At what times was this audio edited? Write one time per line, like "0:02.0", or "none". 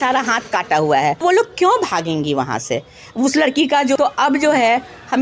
0:01.2
0:04.0